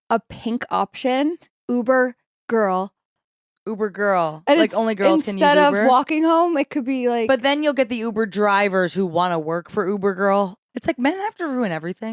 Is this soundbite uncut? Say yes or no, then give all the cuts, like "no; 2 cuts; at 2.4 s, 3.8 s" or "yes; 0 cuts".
no; 2 cuts; at 1.5 s, 10.7 s